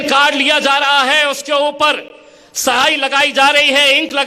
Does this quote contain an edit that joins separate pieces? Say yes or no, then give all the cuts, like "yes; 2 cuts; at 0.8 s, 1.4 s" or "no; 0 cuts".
no; 0 cuts